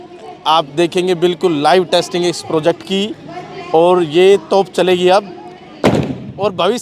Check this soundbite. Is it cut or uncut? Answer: uncut